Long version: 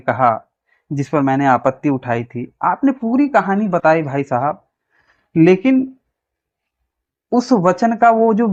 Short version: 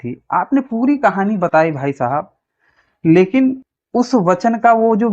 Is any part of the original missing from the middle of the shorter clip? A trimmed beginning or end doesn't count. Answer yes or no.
yes